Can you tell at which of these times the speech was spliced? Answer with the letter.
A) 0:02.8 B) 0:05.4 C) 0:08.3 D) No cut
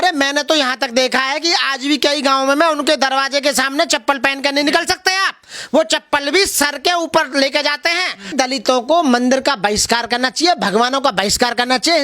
C